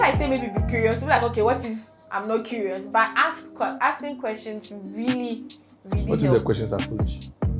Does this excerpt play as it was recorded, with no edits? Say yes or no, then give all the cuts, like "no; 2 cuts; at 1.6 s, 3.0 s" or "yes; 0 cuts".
yes; 0 cuts